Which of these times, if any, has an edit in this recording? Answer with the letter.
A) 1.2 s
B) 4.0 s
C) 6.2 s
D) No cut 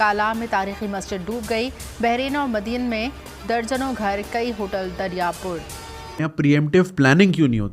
C